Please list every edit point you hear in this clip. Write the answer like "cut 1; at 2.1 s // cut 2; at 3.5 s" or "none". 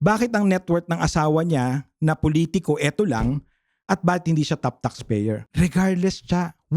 cut 1; at 5.5 s